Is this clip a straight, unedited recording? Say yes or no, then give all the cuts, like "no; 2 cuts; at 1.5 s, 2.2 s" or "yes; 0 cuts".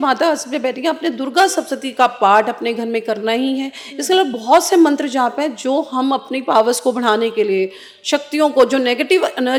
yes; 0 cuts